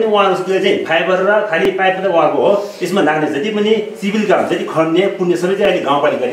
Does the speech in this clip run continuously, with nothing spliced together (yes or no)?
yes